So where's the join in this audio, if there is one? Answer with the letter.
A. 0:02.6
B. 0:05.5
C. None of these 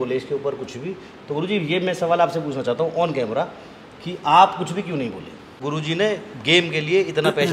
B